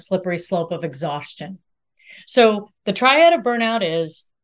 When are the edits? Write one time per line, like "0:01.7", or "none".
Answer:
none